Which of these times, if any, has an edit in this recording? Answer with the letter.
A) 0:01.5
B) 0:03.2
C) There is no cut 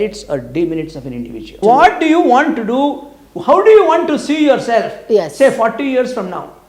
A